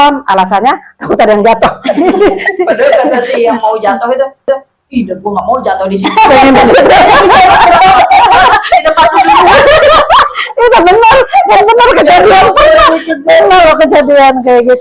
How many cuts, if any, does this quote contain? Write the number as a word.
zero